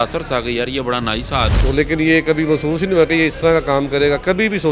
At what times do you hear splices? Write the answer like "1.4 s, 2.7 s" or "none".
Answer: 1.6 s